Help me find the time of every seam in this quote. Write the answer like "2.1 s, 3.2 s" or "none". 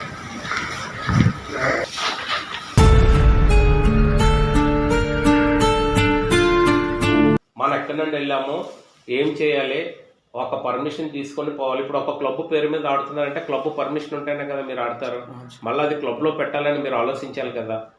7.4 s